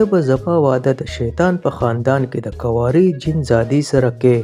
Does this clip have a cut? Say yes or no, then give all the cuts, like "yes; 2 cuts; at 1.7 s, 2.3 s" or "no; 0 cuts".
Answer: no; 0 cuts